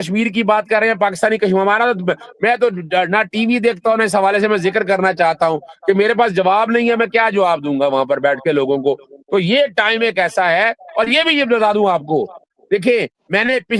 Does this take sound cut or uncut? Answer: uncut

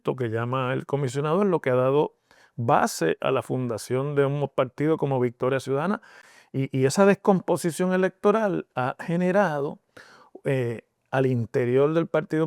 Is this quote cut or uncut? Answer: cut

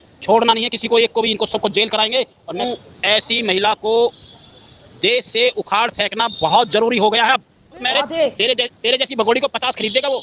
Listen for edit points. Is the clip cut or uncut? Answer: cut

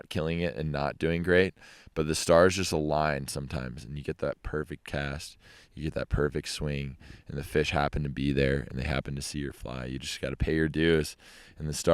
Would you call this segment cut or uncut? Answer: uncut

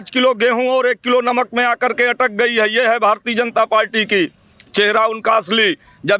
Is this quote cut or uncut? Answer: uncut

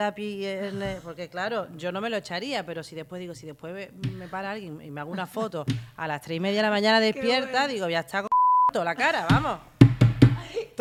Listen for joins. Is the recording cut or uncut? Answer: uncut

